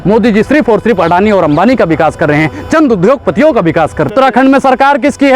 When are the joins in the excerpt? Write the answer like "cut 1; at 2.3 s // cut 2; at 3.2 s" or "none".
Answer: cut 1; at 4.1 s